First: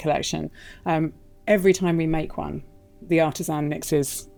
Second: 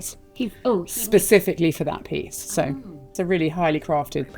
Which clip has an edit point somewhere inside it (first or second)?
second